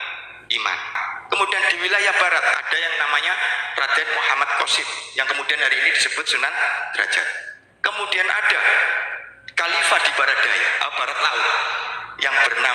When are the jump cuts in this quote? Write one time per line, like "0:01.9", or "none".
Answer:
0:01.0

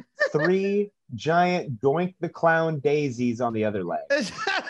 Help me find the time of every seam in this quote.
0:03.8

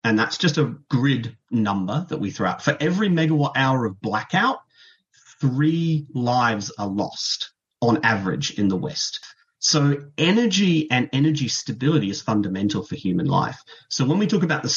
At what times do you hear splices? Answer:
0:09.3

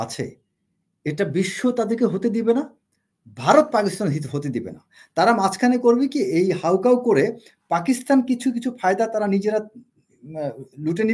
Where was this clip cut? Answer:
none

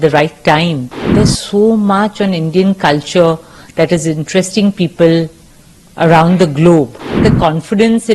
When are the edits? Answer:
0:01.0
0:07.2

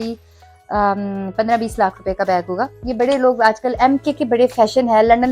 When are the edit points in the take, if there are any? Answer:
0:02.8

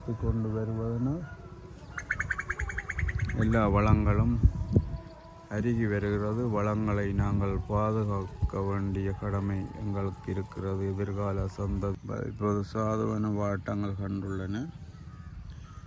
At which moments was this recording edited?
0:12.0

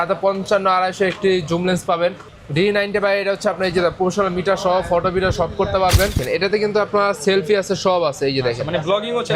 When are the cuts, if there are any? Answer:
0:02.3
0:06.2

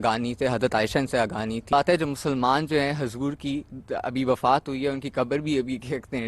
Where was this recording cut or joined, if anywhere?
0:01.7

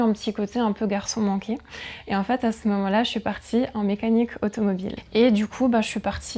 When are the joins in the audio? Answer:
0:04.9

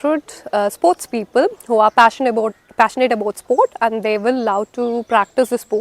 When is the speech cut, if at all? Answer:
none

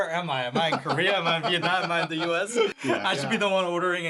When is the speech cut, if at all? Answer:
0:02.7

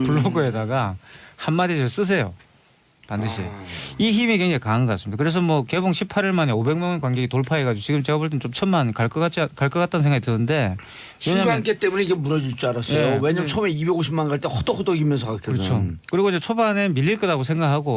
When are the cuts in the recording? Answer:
0:11.8

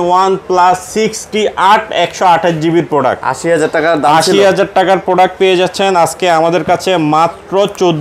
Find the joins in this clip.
none

